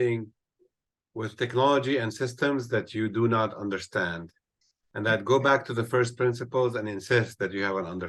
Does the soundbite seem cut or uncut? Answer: uncut